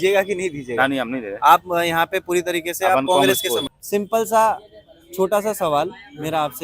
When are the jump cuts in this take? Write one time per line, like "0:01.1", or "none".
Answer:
0:03.6